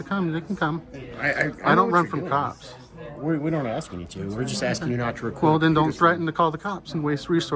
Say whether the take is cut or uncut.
uncut